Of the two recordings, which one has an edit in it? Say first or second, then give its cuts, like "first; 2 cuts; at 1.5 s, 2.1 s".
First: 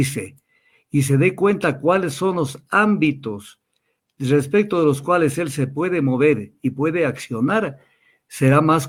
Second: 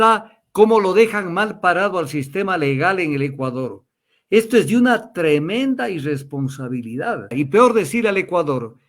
second; 1 cut; at 7.3 s